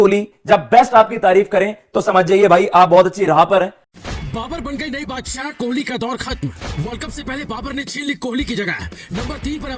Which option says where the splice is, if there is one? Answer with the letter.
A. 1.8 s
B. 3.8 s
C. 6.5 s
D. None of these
B